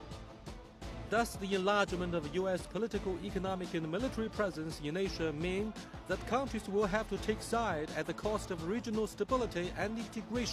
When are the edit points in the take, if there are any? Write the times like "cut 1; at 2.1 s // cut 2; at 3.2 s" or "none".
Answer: cut 1; at 6.8 s